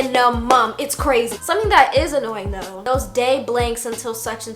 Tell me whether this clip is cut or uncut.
cut